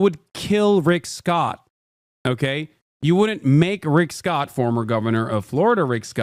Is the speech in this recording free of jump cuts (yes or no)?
yes